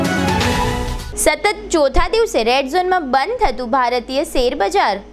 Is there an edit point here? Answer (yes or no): yes